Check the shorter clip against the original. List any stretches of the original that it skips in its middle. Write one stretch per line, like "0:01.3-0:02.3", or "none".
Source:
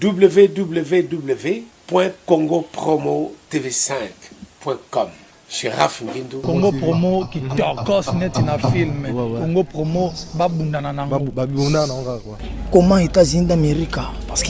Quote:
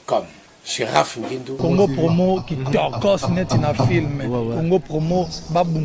none